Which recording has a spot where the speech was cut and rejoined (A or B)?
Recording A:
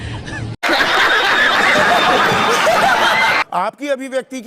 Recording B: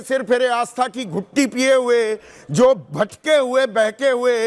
A